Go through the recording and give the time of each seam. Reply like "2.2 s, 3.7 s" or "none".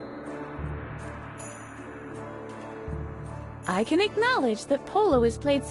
3.6 s